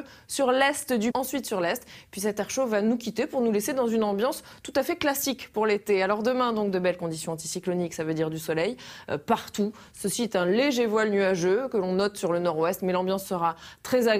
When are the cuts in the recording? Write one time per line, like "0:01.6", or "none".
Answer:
none